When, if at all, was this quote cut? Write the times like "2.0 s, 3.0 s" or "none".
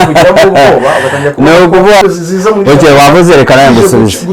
2.0 s